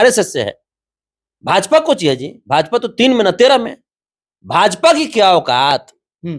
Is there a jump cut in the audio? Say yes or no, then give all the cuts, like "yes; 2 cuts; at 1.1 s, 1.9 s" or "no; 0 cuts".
no; 0 cuts